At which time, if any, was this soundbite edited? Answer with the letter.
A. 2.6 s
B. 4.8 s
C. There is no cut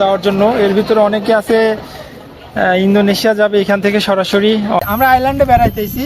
B